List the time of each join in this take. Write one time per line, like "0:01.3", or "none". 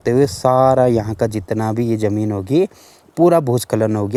none